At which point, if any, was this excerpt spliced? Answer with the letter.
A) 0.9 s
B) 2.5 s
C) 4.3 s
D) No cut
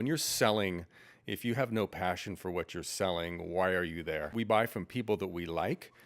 C